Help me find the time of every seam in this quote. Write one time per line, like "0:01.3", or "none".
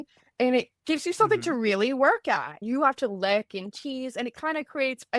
0:02.5